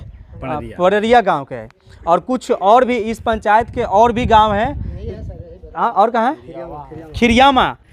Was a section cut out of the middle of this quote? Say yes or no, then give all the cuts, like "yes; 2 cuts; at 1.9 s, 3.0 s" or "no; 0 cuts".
no; 0 cuts